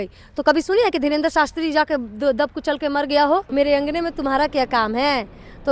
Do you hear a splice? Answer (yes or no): yes